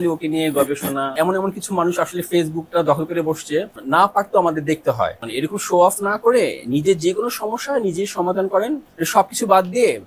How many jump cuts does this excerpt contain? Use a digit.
4